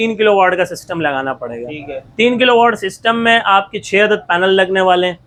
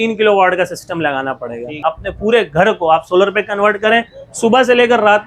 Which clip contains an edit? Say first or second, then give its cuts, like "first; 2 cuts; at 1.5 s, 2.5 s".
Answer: second; 1 cut; at 1.8 s